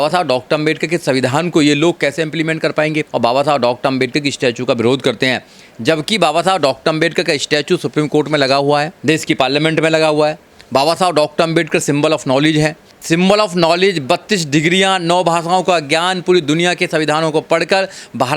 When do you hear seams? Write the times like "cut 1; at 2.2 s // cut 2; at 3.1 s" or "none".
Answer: cut 1; at 3.1 s // cut 2; at 12.9 s

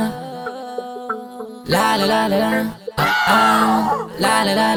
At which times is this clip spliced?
none

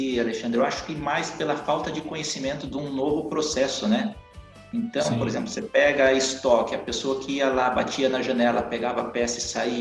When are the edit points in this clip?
none

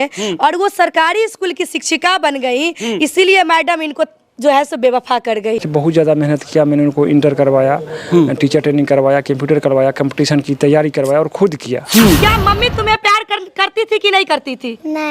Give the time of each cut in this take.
cut 1; at 5.7 s // cut 2; at 12.2 s

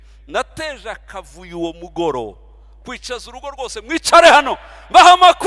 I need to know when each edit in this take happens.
none

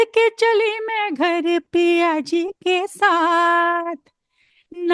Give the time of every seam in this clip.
none

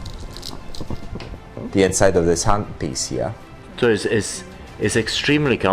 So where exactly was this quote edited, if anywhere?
cut 1; at 3.7 s

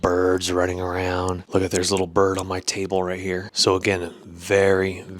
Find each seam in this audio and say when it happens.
cut 1; at 1.4 s // cut 2; at 3.5 s

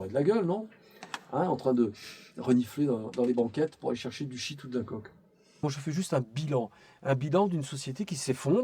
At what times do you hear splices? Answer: cut 1; at 5.6 s

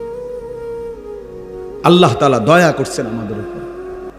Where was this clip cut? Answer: cut 1; at 1.8 s // cut 2; at 3.4 s

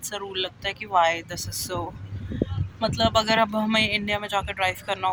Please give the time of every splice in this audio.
none

